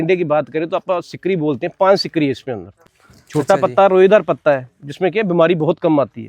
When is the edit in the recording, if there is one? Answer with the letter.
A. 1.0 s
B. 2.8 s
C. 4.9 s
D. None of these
B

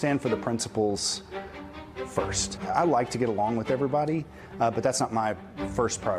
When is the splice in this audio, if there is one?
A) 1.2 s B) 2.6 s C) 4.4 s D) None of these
B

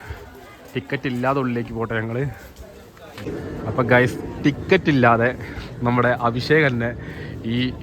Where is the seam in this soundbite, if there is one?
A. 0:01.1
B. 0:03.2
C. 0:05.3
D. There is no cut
B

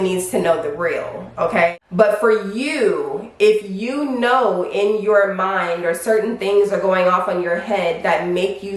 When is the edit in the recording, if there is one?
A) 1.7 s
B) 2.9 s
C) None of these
A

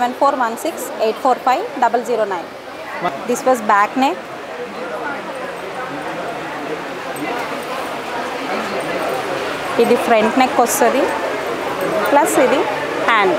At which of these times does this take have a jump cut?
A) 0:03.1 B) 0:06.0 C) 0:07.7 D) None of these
A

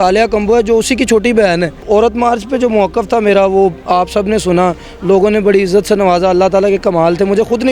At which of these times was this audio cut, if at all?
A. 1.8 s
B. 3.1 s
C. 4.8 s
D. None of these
A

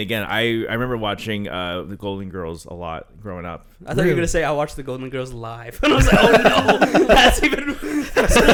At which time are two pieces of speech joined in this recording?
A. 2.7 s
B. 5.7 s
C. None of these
C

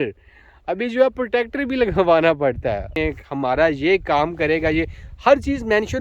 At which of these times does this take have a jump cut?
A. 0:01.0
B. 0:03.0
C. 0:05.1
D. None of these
B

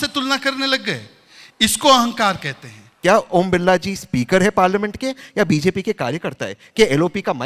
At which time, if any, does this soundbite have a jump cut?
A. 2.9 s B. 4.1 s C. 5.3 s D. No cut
A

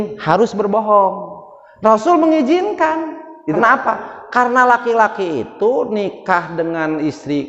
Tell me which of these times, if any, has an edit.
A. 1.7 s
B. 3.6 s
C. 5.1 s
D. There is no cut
B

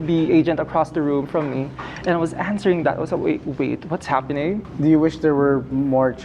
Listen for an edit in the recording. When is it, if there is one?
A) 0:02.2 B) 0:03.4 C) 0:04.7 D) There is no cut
C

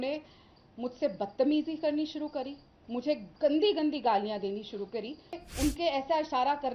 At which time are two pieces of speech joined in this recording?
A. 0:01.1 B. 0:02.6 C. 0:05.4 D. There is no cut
C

